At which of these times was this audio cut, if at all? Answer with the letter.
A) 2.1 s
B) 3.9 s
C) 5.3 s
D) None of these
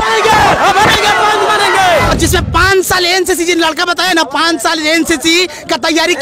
A